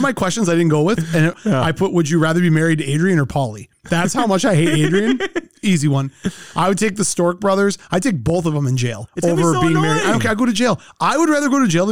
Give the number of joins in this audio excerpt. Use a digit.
1